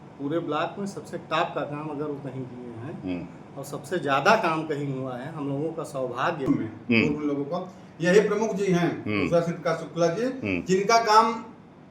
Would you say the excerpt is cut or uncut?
cut